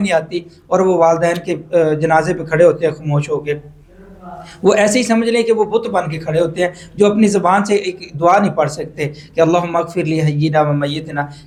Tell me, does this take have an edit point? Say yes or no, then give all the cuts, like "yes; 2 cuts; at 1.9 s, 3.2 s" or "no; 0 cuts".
no; 0 cuts